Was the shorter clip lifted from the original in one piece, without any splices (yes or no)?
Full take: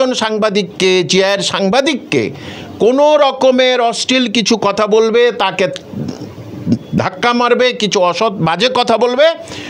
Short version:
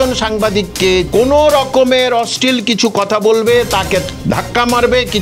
no